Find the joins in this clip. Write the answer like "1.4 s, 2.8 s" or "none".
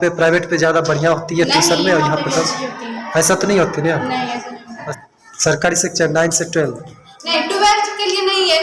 4.9 s